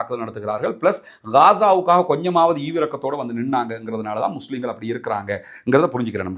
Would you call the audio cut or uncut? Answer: uncut